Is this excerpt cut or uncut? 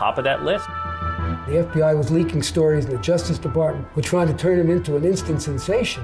cut